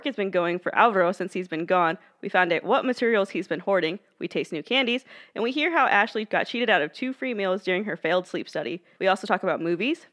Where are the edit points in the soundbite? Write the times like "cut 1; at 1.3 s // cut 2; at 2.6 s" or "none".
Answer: cut 1; at 6.3 s // cut 2; at 8.8 s